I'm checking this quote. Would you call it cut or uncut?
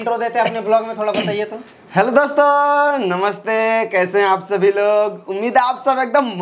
uncut